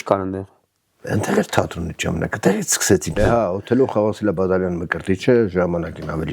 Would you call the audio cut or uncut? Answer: cut